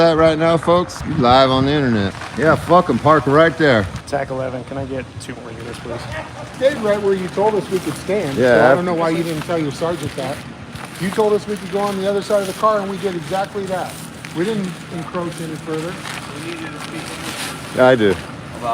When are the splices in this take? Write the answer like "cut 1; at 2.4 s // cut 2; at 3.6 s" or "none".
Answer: cut 1; at 1.0 s // cut 2; at 2.2 s // cut 3; at 4.0 s // cut 4; at 6.5 s